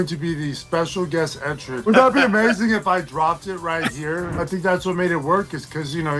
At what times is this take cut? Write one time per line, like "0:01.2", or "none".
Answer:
0:01.8
0:04.4

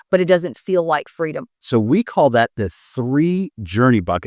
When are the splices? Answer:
0:01.6

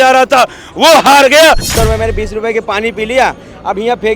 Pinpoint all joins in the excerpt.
0:01.7

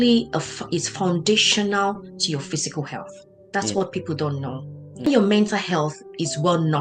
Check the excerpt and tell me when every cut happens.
0:05.1

